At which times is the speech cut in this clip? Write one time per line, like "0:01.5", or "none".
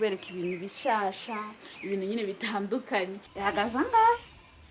0:03.2